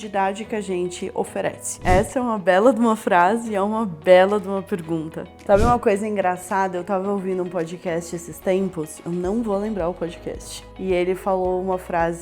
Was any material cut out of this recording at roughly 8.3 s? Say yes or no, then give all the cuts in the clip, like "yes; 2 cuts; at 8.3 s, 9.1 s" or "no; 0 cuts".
no; 2 cuts; at 1.7 s, 5.3 s